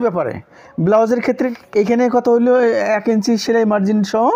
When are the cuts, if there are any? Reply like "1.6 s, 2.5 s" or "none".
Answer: 1.5 s